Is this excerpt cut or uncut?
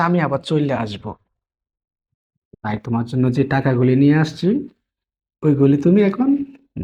uncut